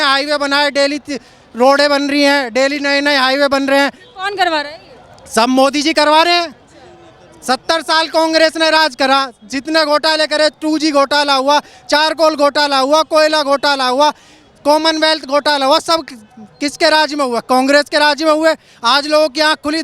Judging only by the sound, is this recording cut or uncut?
uncut